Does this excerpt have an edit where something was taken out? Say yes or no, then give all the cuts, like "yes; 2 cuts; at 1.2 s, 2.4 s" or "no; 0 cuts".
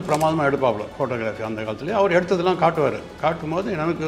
no; 0 cuts